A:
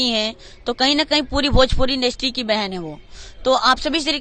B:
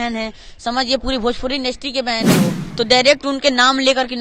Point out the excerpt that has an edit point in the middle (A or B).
B